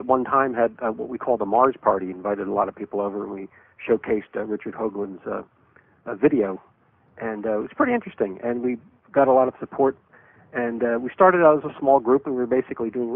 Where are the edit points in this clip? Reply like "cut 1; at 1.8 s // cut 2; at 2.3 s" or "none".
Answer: cut 1; at 1.9 s